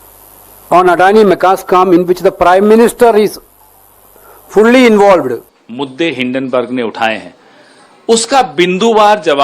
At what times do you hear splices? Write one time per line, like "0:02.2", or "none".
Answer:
0:05.6